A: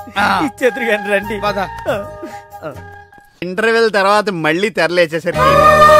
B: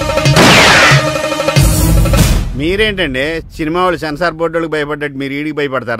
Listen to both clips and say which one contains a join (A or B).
A